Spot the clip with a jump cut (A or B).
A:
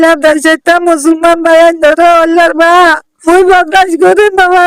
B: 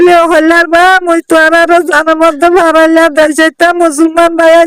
A